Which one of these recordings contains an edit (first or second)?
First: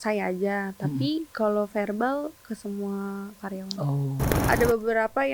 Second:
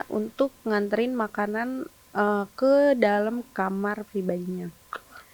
first